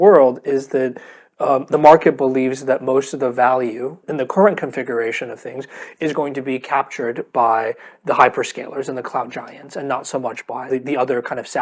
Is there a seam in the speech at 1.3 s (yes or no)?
no